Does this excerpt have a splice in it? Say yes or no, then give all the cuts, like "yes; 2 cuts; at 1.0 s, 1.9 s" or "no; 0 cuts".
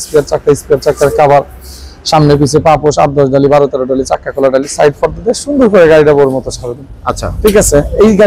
no; 0 cuts